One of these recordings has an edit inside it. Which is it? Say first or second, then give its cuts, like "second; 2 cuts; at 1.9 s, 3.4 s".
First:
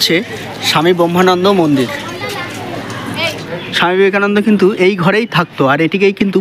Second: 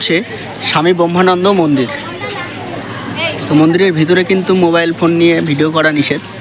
first; 1 cut; at 3.4 s